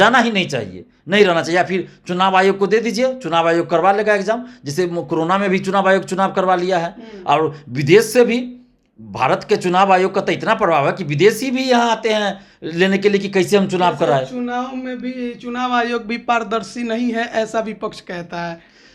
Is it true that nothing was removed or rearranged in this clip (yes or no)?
yes